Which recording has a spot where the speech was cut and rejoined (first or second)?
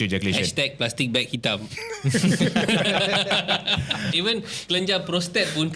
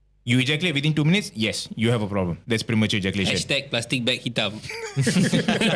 first